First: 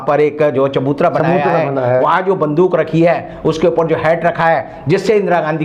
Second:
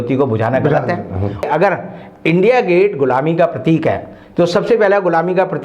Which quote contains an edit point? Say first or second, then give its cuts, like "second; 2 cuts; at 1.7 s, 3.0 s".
second; 1 cut; at 1.4 s